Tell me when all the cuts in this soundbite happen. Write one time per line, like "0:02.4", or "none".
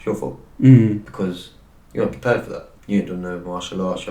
0:01.1
0:02.7

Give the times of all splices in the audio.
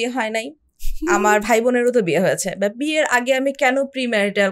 none

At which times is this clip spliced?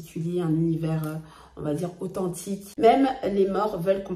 0:02.7

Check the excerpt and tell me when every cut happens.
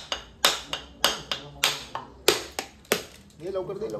none

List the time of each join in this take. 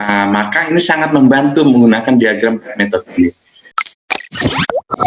0:03.8

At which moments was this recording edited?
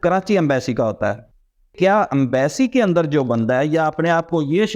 0:01.5

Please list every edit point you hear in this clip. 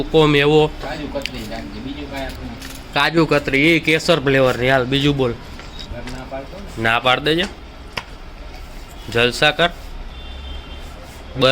0:05.9

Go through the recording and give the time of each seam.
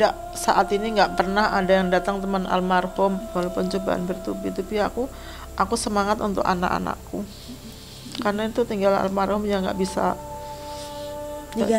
0:03.3

